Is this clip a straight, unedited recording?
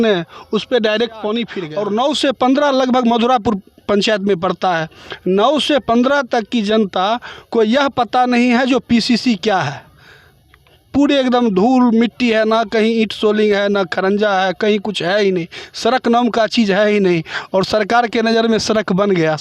no; 1 cut; at 1.6 s

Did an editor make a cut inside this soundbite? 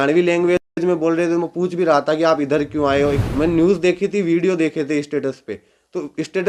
yes; 1 cut; at 3.2 s

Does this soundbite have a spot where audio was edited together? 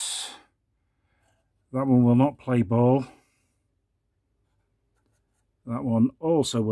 no; 0 cuts

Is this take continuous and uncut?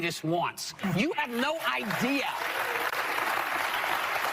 no; 1 cut; at 2.9 s

